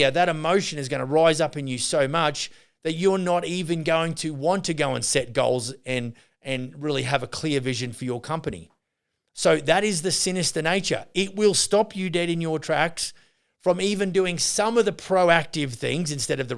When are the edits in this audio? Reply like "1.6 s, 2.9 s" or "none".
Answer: none